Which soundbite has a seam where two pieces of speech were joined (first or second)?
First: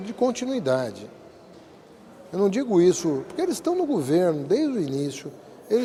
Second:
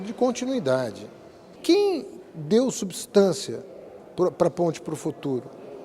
second